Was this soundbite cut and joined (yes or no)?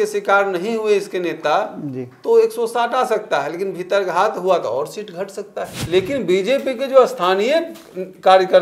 yes